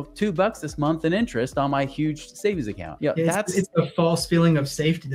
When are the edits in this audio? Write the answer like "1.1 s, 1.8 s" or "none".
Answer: 2.8 s